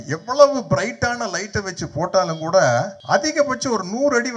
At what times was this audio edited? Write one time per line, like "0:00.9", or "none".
0:03.0